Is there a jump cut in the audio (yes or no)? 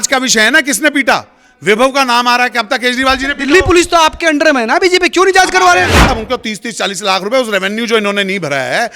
yes